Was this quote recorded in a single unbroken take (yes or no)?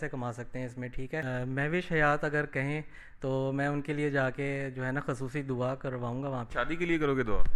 no